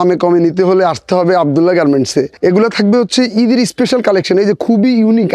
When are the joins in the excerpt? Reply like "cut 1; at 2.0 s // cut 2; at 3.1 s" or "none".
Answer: cut 1; at 2.3 s